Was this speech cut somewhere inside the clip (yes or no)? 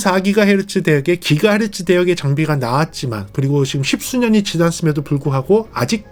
no